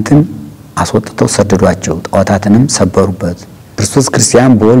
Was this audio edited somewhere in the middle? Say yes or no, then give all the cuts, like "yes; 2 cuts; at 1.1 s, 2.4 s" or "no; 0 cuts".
yes; 1 cut; at 3.8 s